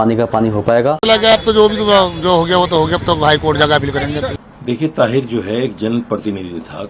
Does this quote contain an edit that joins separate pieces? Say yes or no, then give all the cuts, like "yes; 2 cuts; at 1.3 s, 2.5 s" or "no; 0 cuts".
yes; 2 cuts; at 1.0 s, 4.4 s